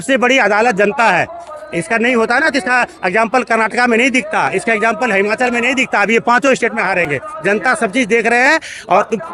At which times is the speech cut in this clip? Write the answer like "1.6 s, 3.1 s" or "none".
none